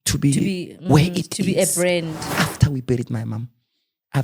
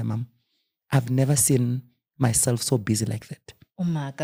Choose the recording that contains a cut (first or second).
first